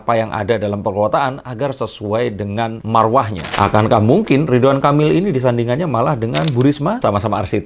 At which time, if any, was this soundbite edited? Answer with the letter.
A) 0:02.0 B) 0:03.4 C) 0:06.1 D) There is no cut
B